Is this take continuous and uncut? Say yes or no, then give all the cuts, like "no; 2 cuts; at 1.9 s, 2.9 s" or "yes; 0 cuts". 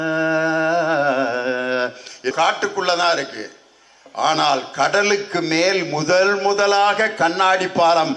no; 1 cut; at 2.3 s